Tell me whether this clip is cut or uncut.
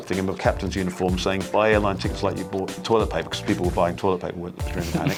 uncut